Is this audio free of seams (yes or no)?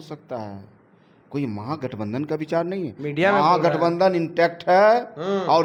yes